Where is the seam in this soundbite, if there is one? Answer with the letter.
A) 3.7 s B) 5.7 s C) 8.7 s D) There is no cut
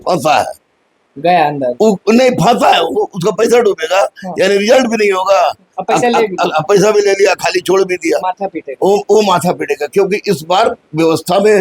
D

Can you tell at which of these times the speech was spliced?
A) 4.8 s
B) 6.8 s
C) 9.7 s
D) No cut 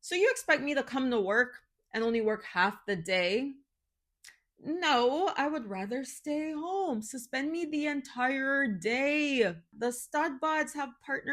C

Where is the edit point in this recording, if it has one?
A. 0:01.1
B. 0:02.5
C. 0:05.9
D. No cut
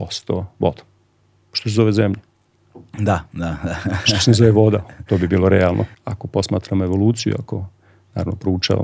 C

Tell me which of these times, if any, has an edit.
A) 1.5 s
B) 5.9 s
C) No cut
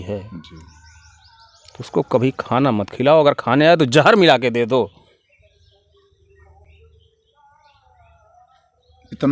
C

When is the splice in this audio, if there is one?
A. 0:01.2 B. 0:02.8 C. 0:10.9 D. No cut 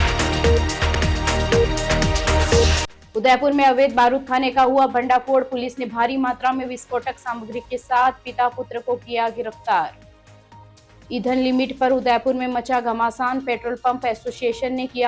B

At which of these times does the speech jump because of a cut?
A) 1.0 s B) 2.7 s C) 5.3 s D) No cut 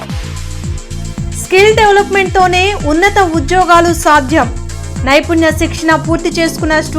A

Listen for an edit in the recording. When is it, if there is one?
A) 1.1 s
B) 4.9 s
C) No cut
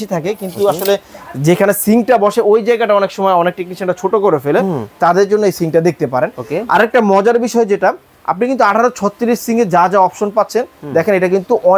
C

